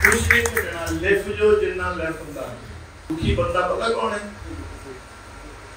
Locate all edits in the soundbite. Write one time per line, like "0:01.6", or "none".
0:03.0